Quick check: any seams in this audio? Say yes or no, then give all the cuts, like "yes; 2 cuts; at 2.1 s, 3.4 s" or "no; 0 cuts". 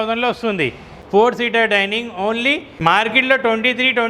yes; 2 cuts; at 1.0 s, 2.7 s